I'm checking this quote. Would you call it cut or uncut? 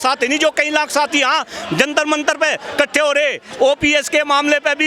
cut